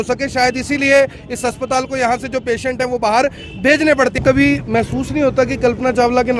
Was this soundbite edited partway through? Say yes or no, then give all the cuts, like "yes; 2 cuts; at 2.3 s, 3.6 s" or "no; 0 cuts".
yes; 1 cut; at 4.2 s